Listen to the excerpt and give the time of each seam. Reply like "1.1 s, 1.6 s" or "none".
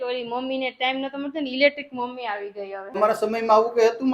2.9 s